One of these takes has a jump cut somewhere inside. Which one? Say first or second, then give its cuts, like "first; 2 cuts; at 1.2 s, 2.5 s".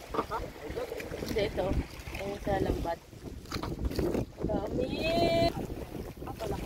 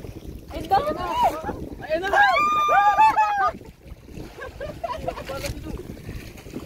first; 1 cut; at 5.5 s